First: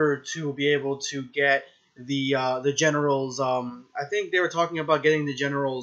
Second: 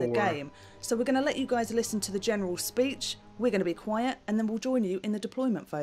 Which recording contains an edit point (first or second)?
second